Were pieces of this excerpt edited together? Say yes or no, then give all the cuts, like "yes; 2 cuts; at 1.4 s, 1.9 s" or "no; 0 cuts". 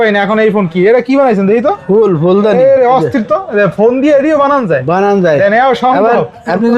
no; 0 cuts